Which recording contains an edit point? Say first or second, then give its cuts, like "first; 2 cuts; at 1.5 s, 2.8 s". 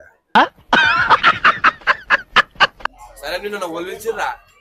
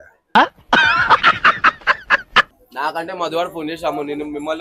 second; 1 cut; at 2.5 s